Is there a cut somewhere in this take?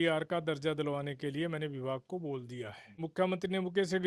yes; 1 cut; at 3.1 s

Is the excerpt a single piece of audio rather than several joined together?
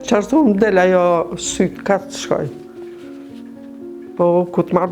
no; 2 cuts; at 2.5 s, 4.2 s

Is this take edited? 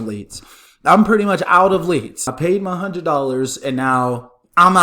yes; 1 cut; at 2.3 s

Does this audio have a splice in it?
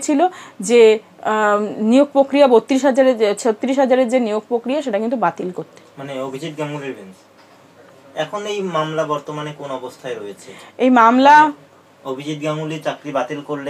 no; 0 cuts

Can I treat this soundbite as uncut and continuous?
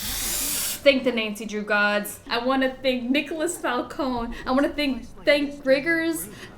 no; 1 cut; at 2.2 s

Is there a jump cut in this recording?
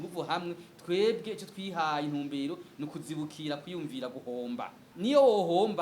yes; 1 cut; at 4.9 s

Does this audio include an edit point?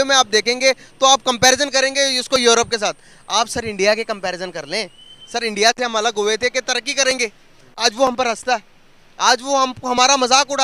no; 0 cuts

